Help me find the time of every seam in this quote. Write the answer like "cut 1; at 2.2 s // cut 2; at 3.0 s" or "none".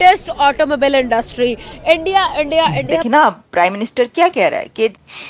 cut 1; at 3.0 s

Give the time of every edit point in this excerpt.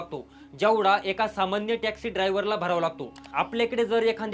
cut 1; at 3.3 s

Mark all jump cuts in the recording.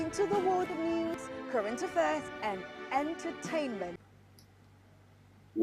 cut 1; at 4.2 s

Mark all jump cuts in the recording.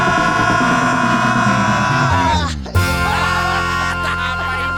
none

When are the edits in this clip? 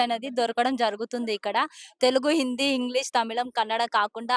none

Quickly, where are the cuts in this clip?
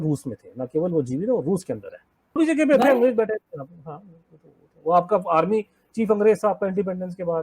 cut 1; at 2.4 s

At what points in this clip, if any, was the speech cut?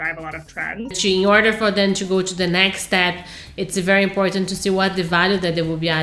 cut 1; at 1.0 s

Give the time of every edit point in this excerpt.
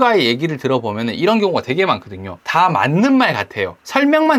none

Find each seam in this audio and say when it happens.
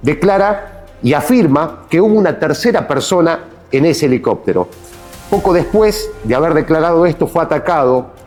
none

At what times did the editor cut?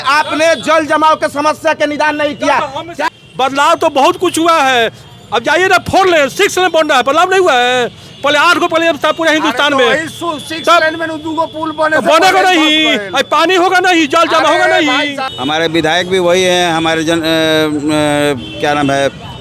cut 1; at 3.0 s // cut 2; at 15.2 s

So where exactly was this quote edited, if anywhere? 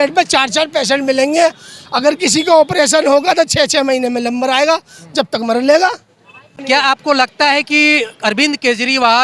cut 1; at 6.5 s

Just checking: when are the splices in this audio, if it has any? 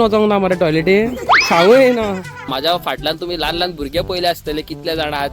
cut 1; at 1.3 s // cut 2; at 2.4 s

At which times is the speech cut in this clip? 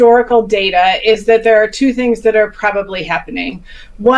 none

